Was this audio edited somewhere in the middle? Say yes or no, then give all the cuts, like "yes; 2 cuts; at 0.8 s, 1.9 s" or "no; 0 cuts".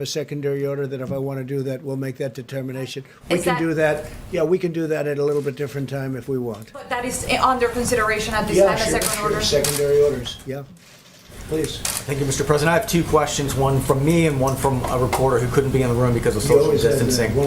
no; 0 cuts